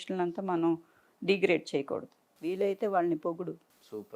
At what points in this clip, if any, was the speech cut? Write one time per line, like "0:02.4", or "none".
none